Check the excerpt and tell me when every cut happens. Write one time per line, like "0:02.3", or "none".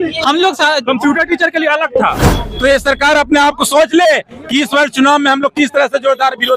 0:02.2